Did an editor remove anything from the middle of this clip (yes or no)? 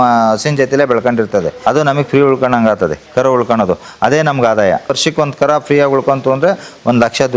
yes